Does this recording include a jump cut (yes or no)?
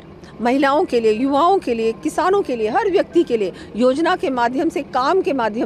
no